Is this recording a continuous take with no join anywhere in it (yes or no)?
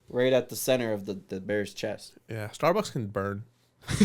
yes